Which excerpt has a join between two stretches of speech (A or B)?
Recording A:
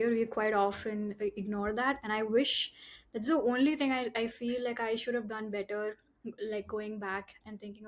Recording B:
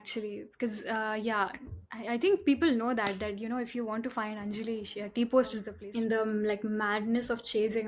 B